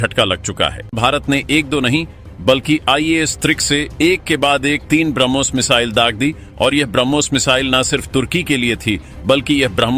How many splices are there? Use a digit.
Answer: 1